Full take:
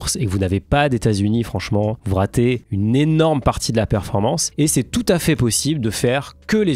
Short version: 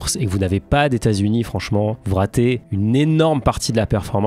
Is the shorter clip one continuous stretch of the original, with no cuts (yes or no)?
yes